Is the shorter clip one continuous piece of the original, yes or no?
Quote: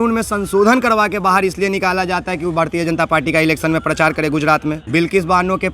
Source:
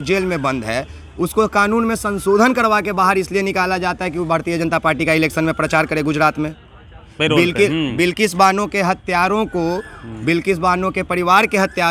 no